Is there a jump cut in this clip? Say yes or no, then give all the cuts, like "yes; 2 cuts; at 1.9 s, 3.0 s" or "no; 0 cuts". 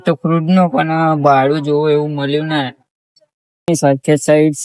yes; 1 cut; at 3.7 s